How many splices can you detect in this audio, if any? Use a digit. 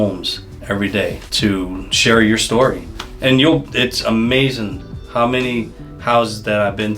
1